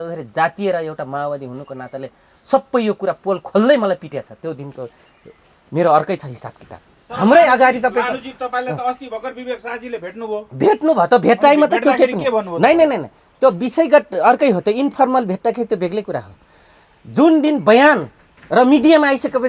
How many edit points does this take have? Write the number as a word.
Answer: one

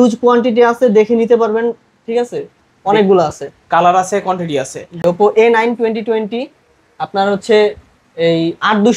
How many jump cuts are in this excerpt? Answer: one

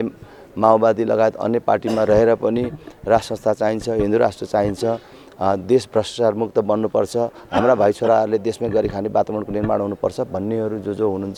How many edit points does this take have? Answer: zero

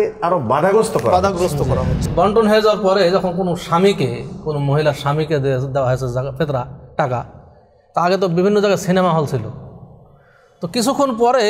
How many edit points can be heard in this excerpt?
one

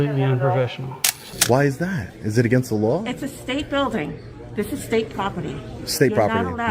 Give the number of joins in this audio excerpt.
one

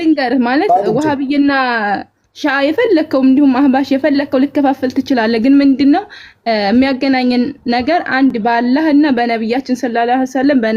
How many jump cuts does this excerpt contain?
zero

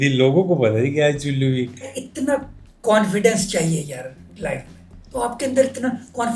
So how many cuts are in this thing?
one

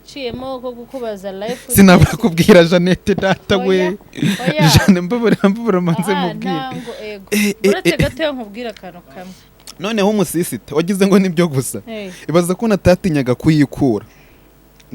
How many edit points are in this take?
one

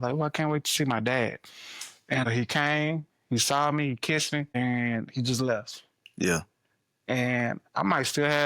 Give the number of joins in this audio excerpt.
two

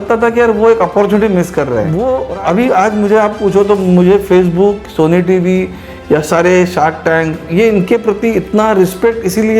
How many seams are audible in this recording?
one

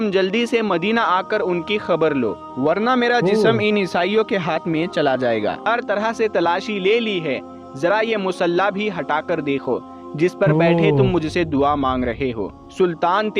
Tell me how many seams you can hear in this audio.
one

